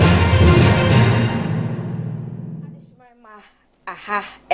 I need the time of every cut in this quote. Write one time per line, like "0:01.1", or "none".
none